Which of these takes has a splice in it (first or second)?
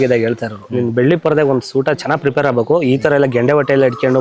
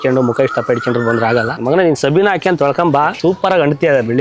second